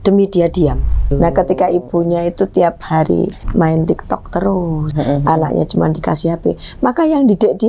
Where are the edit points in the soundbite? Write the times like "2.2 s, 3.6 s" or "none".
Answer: 1.1 s, 3.4 s, 4.9 s